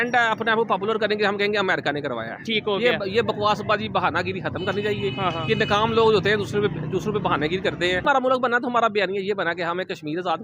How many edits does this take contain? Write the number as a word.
one